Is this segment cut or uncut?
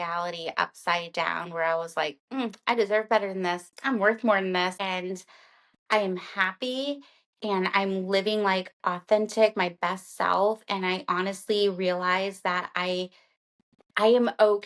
cut